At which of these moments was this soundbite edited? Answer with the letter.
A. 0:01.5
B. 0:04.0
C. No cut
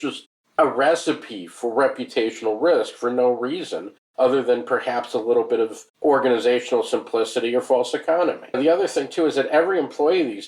C